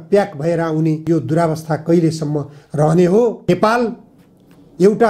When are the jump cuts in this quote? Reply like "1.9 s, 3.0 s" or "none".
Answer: 3.5 s